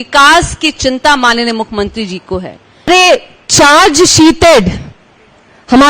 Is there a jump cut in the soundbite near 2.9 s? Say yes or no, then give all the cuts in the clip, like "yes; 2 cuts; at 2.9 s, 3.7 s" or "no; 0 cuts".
yes; 1 cut; at 2.9 s